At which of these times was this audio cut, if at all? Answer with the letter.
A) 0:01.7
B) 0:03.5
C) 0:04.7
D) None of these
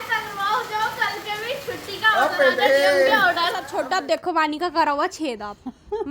B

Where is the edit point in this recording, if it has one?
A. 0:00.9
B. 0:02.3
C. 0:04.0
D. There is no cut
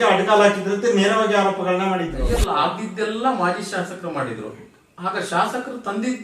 B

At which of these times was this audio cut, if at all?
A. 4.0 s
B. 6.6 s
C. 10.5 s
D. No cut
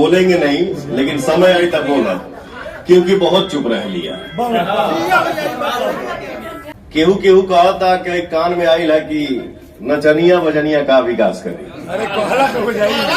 B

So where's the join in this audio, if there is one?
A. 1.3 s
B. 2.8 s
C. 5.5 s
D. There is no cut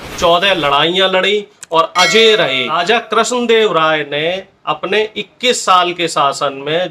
B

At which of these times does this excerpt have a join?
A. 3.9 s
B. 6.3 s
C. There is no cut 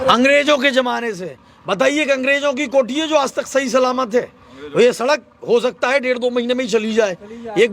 C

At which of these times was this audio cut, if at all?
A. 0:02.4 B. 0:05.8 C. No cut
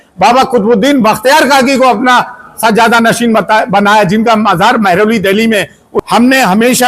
B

